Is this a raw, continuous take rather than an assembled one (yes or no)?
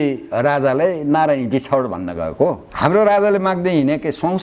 no